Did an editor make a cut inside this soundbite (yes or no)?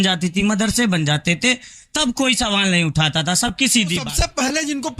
yes